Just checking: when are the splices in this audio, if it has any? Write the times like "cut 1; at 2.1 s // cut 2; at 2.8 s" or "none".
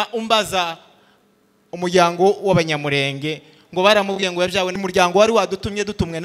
cut 1; at 4.8 s